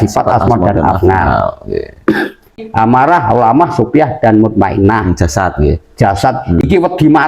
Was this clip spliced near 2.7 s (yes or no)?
yes